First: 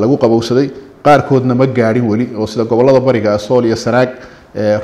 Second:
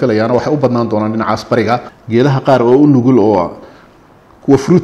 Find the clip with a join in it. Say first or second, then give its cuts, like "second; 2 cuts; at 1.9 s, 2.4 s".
second; 1 cut; at 1.8 s